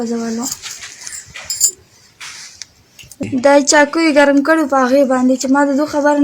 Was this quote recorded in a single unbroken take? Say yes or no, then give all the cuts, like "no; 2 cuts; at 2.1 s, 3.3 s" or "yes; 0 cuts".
no; 1 cut; at 3.2 s